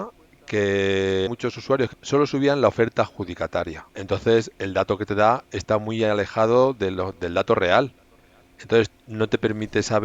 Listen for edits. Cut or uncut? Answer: cut